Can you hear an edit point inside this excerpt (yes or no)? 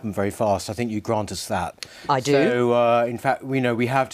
yes